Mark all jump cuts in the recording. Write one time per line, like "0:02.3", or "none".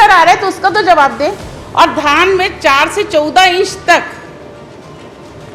0:01.5